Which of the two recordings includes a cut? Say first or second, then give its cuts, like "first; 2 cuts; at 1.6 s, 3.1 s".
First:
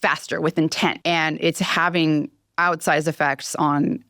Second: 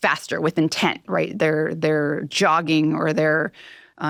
first; 1 cut; at 1.0 s